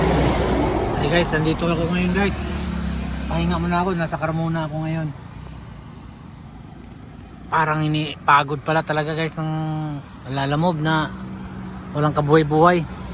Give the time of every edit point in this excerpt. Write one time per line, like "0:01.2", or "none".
none